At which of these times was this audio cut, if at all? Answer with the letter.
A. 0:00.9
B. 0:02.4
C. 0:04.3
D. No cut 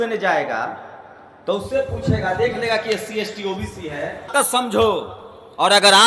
C